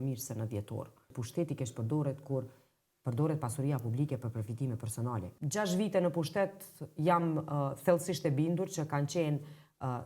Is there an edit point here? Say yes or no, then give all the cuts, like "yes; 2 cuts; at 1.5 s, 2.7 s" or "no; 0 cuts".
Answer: yes; 2 cuts; at 1.2 s, 5.5 s